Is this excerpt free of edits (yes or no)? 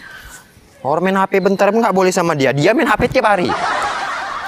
no